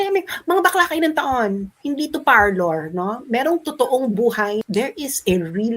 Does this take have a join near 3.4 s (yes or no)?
no